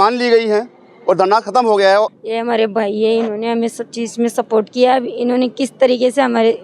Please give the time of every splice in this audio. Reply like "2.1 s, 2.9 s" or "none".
2.1 s

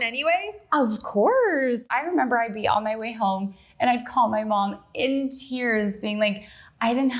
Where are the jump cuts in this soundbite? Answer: 1.9 s

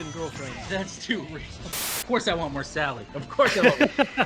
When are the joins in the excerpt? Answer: 2.0 s

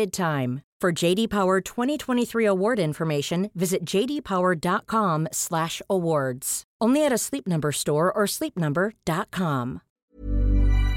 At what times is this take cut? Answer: 9.9 s

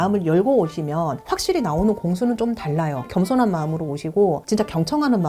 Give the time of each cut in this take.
3.1 s

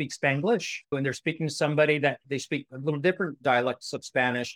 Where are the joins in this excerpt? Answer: 0.9 s, 2.4 s

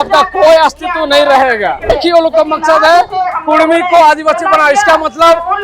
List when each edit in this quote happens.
1.9 s

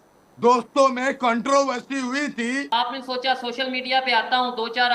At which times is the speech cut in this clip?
2.7 s

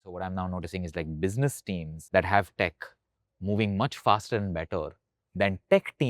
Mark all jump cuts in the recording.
2.0 s

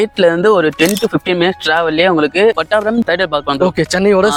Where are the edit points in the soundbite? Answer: none

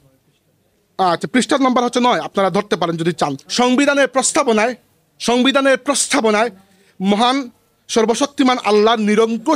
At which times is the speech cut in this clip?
3.4 s

